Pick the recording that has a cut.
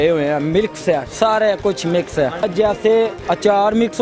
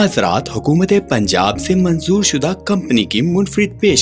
first; 1 cut; at 2.4 s

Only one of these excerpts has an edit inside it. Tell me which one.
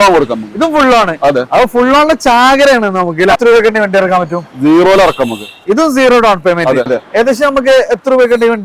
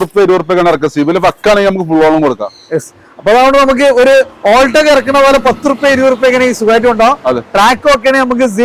first; 2 cuts; at 3.4 s, 7.0 s

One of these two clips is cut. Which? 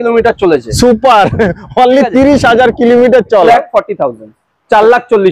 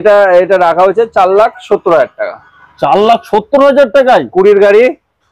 first; 1 cut; at 3.5 s

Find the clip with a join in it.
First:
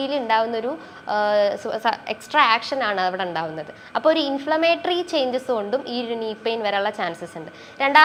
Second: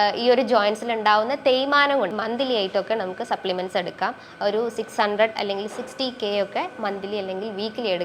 second; 1 cut; at 2.1 s

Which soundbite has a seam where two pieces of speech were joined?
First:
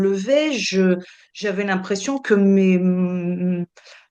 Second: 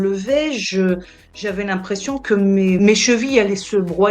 second; 1 cut; at 2.8 s

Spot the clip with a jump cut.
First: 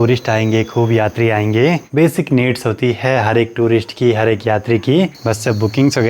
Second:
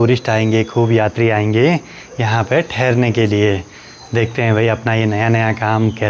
first; 2 cuts; at 1.8 s, 5.1 s

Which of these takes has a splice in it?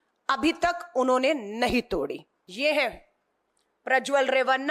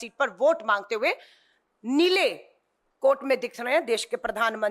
first; 1 cut; at 2.4 s

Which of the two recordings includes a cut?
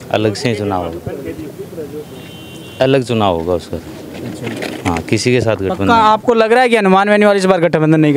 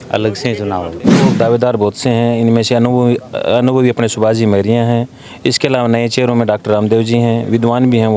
second; 1 cut; at 1.2 s

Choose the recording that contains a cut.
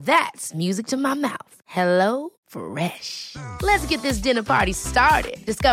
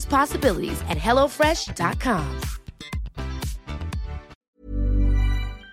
second; 1 cut; at 4.3 s

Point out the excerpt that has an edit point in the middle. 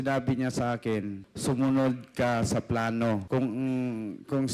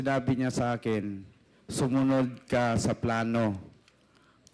first; 2 cuts; at 1.2 s, 3.2 s

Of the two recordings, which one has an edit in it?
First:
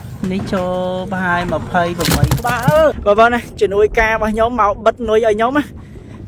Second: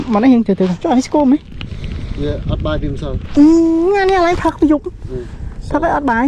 first; 1 cut; at 3.0 s

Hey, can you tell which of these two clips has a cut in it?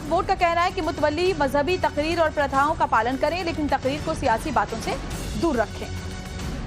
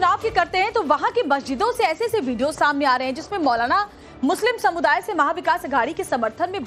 first; 1 cut; at 3.7 s

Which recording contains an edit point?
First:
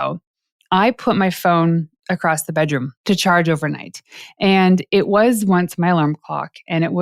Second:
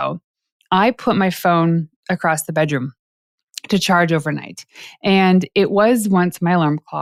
first; 1 cut; at 2.9 s

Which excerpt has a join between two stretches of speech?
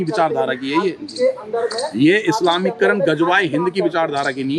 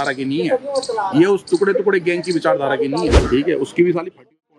second; 1 cut; at 3.2 s

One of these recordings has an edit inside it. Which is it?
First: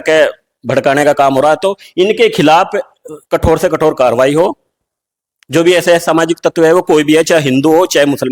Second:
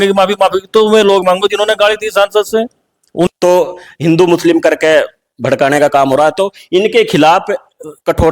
second; 1 cut; at 3.3 s

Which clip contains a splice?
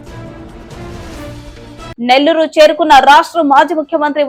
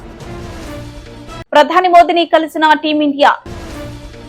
second; 1 cut; at 1.5 s

